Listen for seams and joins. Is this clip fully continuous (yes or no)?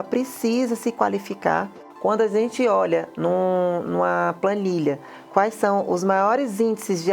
no